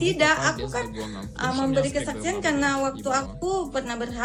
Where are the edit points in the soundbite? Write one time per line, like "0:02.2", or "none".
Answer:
none